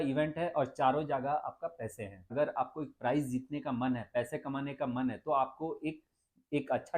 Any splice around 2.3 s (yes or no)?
yes